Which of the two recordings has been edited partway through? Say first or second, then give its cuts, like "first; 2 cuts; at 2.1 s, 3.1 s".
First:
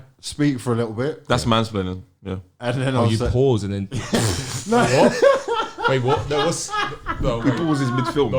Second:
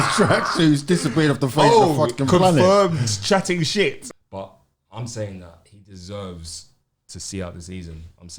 second; 1 cut; at 4.1 s